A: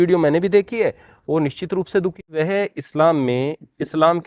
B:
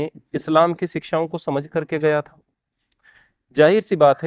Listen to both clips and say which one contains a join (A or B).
A